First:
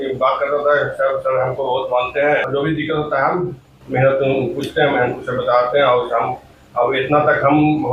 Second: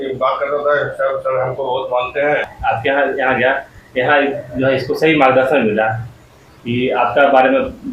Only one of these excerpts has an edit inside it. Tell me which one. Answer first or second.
second